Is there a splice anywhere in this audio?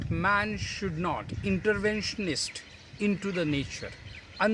yes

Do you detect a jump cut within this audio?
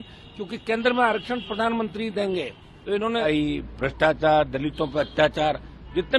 yes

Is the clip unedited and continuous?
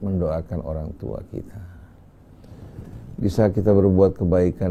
yes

